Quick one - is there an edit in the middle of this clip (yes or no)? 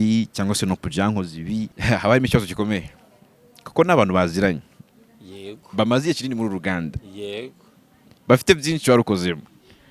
yes